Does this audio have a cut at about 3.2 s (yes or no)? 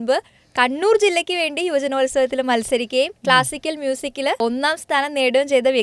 no